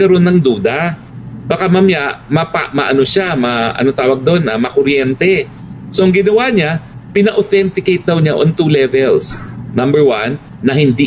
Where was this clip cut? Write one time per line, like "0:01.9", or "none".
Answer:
none